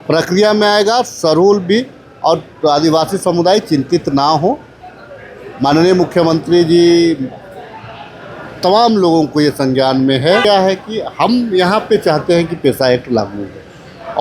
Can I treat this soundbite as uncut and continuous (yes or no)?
no